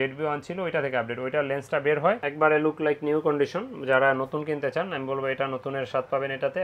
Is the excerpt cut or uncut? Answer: cut